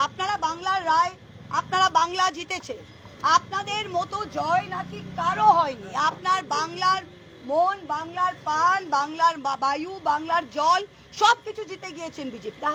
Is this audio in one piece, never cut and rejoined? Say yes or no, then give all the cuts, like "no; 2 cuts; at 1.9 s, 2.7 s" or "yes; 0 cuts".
yes; 0 cuts